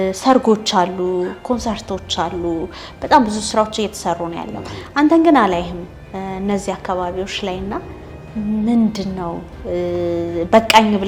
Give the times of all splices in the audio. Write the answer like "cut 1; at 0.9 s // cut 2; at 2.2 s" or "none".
none